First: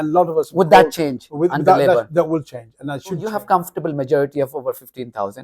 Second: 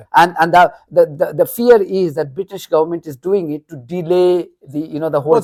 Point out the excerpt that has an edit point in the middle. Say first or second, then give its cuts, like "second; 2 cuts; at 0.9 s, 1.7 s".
first; 1 cut; at 3.3 s